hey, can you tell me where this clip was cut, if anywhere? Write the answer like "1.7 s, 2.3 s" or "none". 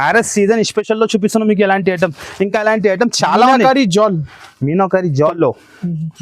5.3 s